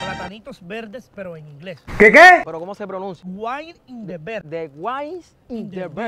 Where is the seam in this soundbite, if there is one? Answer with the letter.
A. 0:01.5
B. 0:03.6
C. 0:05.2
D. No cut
D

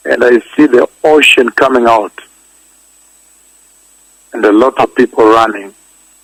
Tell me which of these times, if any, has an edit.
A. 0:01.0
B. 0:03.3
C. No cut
C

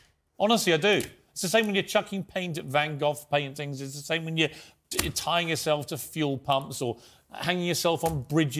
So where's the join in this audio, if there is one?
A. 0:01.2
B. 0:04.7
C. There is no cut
C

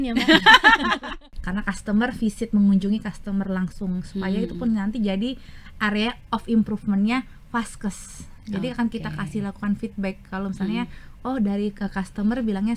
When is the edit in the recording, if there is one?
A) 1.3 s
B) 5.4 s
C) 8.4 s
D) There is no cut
A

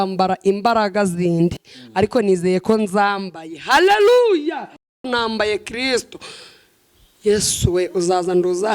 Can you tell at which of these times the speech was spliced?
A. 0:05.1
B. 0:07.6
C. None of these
A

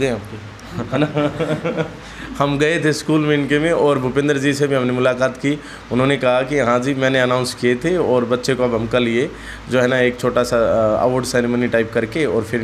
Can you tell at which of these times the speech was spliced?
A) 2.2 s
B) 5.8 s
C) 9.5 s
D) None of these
D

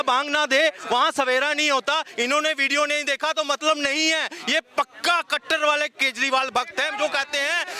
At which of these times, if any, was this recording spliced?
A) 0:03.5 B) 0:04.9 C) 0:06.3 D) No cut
D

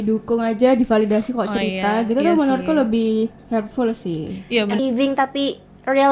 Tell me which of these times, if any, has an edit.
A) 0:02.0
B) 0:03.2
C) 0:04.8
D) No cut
C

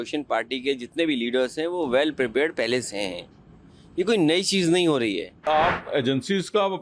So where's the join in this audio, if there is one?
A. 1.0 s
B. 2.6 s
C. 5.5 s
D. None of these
C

